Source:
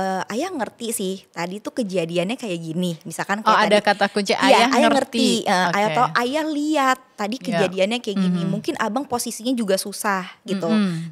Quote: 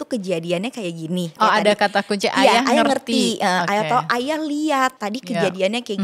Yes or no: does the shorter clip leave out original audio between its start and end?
yes